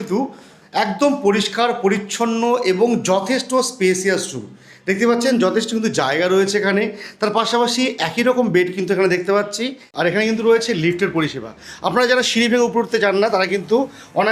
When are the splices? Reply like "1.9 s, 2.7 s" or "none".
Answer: 9.9 s